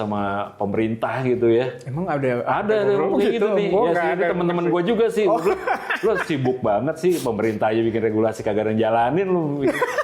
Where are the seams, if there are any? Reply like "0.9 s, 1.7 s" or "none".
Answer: none